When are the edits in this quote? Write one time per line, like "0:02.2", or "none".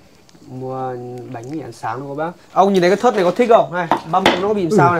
0:02.4